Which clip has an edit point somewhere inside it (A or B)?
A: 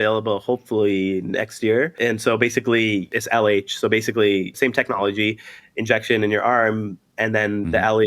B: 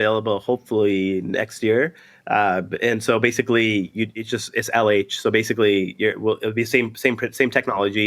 A